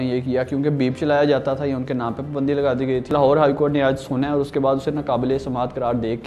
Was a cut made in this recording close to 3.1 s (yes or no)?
yes